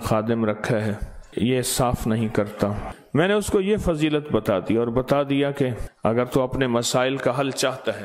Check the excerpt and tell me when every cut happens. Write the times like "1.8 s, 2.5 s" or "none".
1.2 s, 2.9 s, 5.8 s

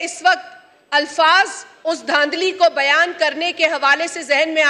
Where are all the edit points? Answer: none

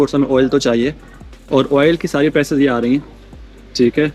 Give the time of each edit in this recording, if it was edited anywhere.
none

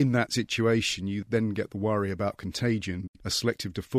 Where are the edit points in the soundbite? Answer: 3.1 s

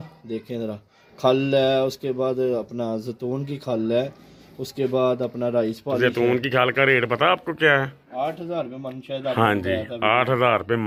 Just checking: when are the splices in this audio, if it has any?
none

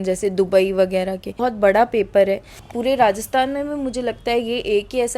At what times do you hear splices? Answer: 1.4 s, 2.6 s

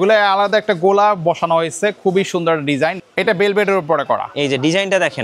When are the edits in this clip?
3.0 s

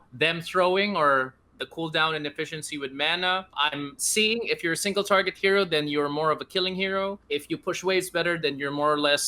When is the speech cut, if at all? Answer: 3.5 s, 7.2 s

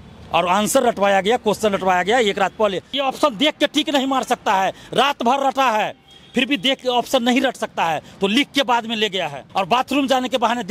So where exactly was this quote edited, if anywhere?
3.0 s, 9.4 s

